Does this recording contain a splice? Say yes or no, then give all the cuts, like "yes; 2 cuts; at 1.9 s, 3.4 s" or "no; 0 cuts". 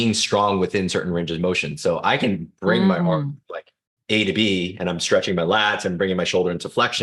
no; 0 cuts